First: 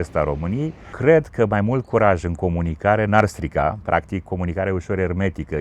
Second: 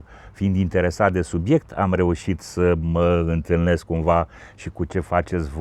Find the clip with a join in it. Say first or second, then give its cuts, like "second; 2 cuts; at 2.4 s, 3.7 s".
first; 1 cut; at 0.9 s